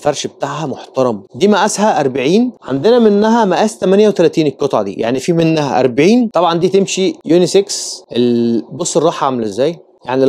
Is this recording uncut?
no; 2 cuts; at 1.3 s, 6.3 s

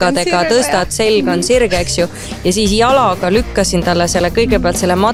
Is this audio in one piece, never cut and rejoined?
yes; 0 cuts

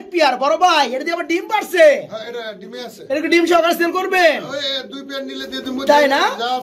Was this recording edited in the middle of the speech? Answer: no; 0 cuts

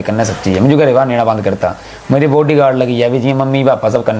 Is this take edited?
no; 0 cuts

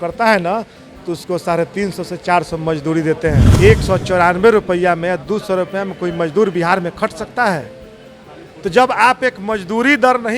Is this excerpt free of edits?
no; 1 cut; at 3.5 s

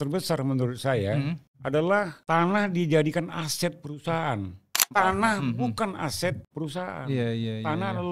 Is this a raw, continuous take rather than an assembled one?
no; 4 cuts; at 1.5 s, 2.2 s, 4.9 s, 6.5 s

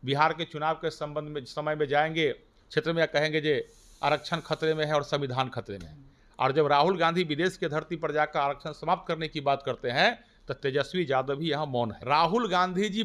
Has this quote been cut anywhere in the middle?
yes; 1 cut; at 12.0 s

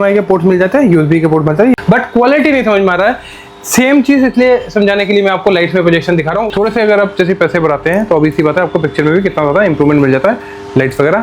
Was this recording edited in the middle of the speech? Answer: yes; 2 cuts; at 1.7 s, 6.5 s

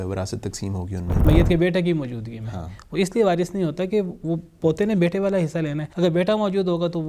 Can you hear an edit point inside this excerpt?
yes; 2 cuts; at 1.3 s, 5.8 s

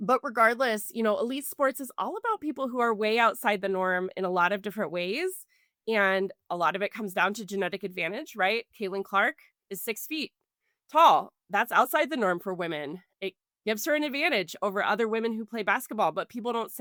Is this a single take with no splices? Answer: yes; 0 cuts

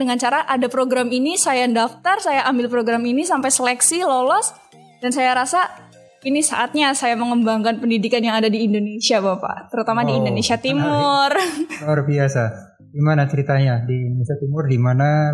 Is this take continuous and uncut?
yes; 0 cuts

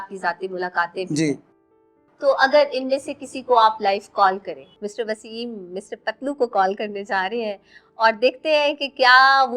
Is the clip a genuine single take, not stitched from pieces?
no; 1 cut; at 4.6 s

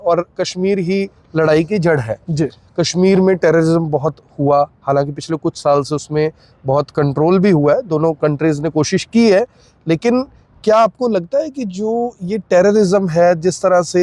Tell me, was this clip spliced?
no; 0 cuts

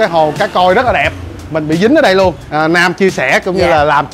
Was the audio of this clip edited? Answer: yes; 1 cut; at 2.4 s

